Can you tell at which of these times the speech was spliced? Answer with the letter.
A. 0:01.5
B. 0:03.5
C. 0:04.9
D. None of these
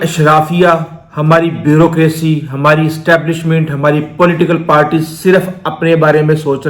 D